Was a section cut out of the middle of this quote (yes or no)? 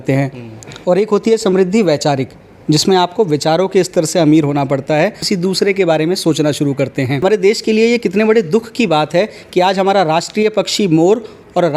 yes